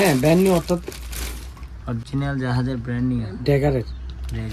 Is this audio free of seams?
yes; 0 cuts

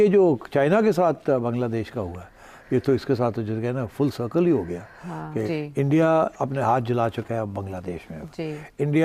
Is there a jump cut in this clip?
yes; 1 cut; at 5.5 s

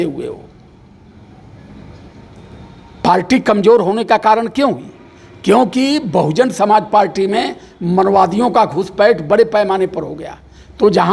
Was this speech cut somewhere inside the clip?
no; 0 cuts

